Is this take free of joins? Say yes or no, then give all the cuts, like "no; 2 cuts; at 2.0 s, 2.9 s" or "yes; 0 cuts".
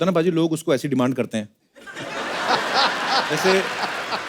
yes; 0 cuts